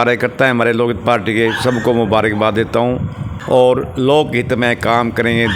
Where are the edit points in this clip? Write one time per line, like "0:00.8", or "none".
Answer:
0:03.3